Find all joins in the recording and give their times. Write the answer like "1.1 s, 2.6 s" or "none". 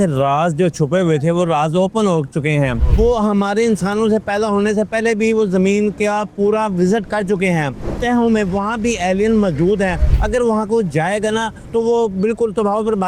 2.8 s, 7.8 s, 10.1 s